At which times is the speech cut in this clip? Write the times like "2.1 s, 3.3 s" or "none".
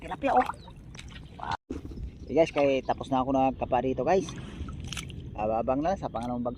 1.5 s